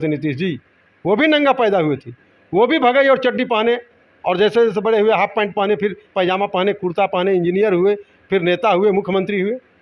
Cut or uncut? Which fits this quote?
uncut